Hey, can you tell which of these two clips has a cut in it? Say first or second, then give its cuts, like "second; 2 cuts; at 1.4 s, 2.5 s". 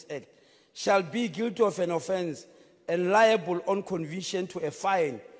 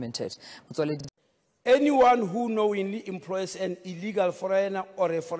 second; 1 cut; at 1.0 s